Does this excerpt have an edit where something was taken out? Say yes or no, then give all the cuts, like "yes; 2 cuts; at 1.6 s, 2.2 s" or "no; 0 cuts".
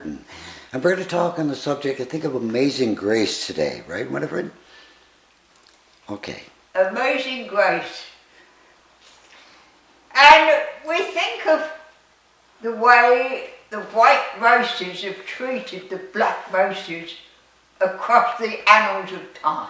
no; 0 cuts